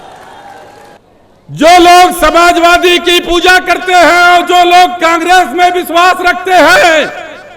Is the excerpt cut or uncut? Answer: cut